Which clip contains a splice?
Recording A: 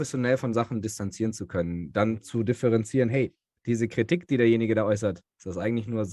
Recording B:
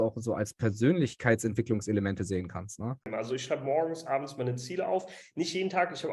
B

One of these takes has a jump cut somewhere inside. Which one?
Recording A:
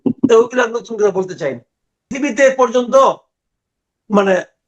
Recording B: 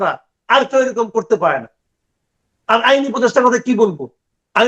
A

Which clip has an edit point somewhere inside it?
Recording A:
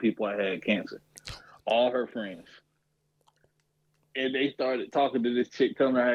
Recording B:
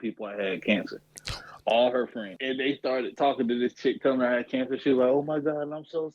B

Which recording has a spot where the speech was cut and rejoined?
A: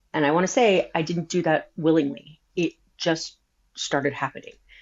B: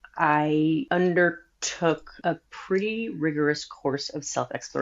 B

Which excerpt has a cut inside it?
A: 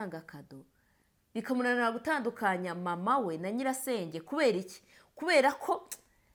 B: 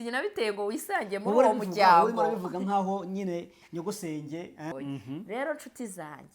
B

